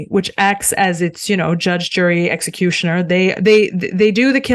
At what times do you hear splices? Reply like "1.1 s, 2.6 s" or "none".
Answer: none